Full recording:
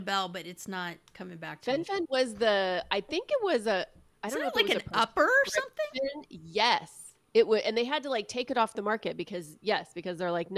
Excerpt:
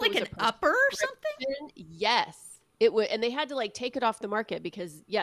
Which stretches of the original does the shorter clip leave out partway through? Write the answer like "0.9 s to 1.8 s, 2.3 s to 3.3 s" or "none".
none